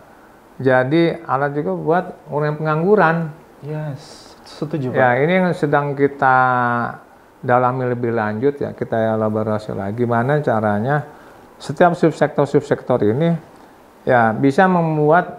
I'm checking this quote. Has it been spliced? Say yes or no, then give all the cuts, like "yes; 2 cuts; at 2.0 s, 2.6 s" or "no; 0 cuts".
no; 0 cuts